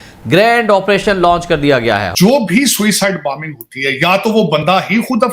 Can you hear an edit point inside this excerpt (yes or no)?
yes